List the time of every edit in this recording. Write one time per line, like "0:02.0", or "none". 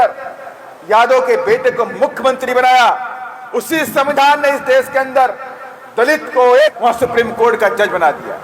0:06.8

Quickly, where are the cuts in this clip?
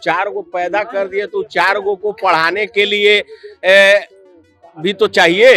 none

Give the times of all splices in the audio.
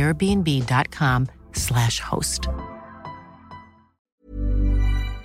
0:03.9

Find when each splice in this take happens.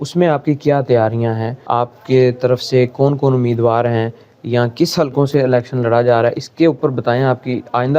0:01.7

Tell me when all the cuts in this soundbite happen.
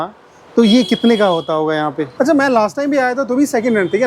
0:02.0

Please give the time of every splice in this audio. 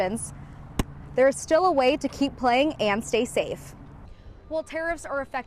0:04.1

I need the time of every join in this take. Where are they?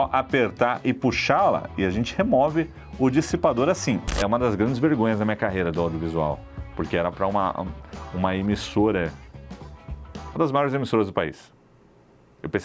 0:04.1

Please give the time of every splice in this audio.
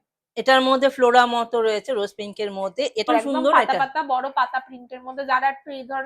0:03.1

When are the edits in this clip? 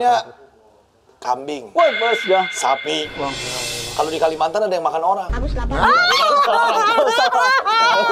none

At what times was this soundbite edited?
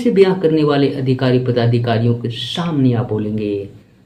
none

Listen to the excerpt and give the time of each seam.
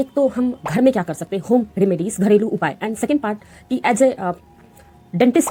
none

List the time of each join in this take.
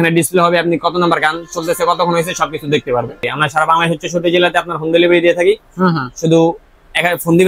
0:03.3

